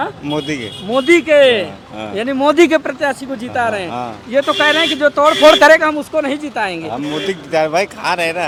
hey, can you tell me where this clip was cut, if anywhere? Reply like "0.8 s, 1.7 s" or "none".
none